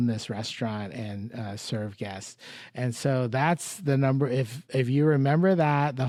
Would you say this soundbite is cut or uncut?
uncut